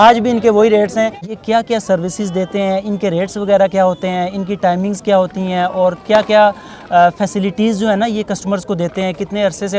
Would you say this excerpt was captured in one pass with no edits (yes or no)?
no